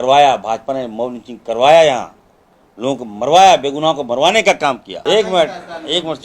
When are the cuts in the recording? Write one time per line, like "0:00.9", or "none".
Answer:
0:04.9

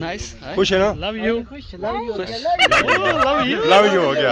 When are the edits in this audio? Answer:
none

